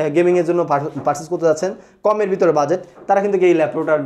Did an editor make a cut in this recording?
no; 0 cuts

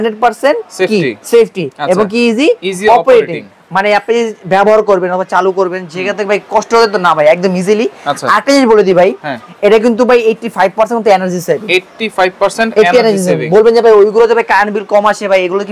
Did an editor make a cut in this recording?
no; 0 cuts

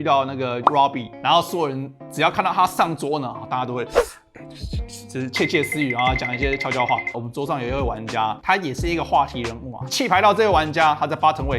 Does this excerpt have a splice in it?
yes; 3 cuts; at 1.1 s, 7.1 s, 9.8 s

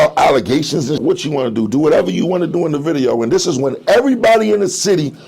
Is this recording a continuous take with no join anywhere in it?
no; 1 cut; at 1.0 s

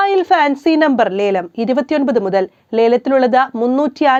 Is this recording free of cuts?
yes; 0 cuts

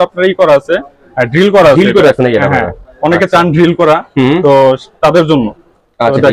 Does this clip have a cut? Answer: no; 0 cuts

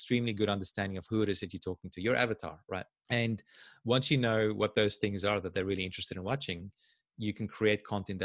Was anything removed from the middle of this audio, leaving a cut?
yes; 1 cut; at 2.9 s

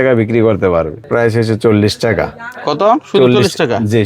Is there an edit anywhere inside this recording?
yes; 1 cut; at 1.1 s

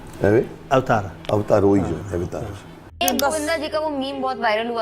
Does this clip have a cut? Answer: yes; 1 cut; at 2.8 s

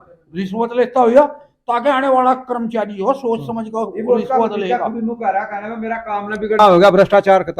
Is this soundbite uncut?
no; 1 cut; at 6.6 s

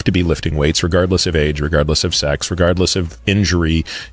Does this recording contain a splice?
no; 0 cuts

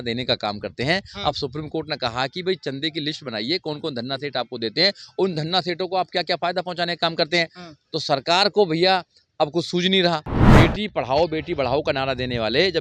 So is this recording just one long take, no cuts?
no; 1 cut; at 10.3 s

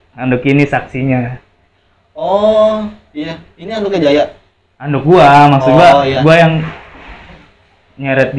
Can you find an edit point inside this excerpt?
no; 0 cuts

